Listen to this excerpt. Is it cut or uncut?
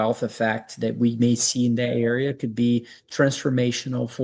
uncut